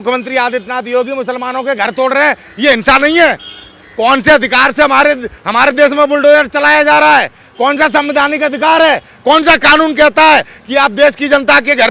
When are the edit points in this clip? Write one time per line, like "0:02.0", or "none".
none